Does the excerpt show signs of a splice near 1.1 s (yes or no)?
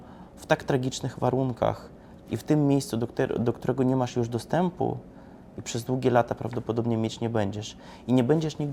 no